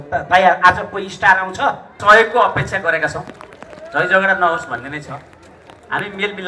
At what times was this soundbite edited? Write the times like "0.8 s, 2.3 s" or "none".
2.0 s